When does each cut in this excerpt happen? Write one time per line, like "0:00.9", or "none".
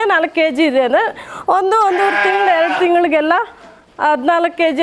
none